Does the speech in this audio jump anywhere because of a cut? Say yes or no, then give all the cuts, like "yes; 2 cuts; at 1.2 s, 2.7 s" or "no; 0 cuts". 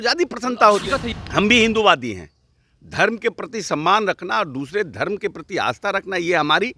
yes; 1 cut; at 1.1 s